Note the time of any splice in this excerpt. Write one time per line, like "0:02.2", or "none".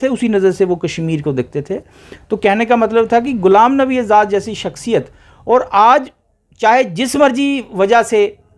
none